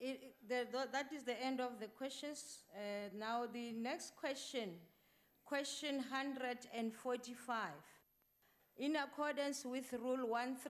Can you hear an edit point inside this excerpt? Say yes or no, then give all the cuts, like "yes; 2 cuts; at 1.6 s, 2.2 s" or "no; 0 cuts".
no; 0 cuts